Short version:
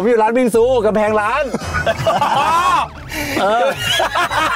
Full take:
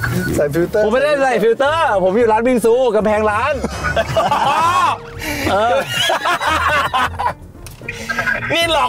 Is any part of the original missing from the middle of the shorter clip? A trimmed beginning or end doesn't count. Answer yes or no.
no